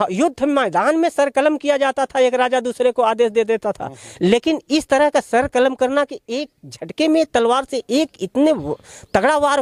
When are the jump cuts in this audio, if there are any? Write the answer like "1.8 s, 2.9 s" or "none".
none